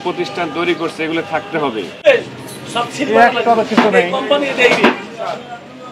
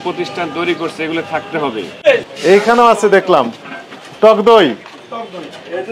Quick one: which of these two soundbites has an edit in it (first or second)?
second